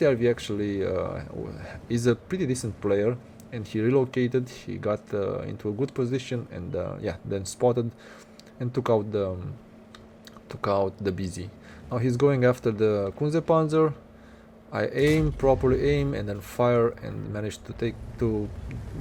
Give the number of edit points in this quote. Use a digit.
0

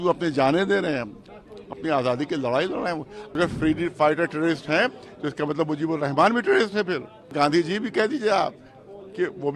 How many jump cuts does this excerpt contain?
2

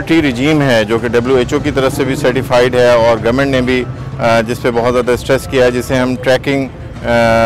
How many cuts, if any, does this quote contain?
0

